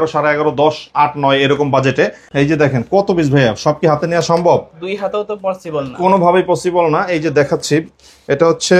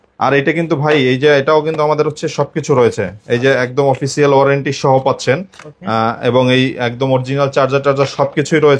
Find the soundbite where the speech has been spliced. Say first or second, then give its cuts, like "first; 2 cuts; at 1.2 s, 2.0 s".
first; 1 cut; at 2.2 s